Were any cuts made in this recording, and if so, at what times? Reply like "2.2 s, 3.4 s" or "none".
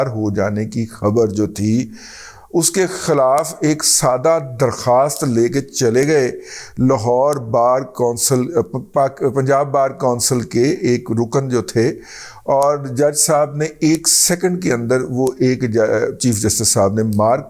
none